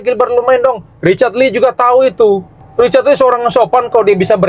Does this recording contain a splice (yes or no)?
yes